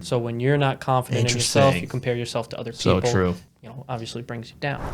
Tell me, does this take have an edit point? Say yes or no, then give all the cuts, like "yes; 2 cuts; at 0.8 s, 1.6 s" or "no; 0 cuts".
yes; 1 cut; at 3.5 s